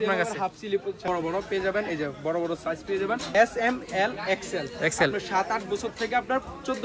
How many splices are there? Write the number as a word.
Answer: two